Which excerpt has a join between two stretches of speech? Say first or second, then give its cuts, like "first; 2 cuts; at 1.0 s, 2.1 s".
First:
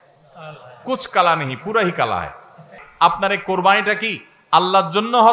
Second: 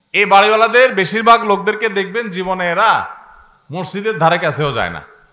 first; 1 cut; at 2.8 s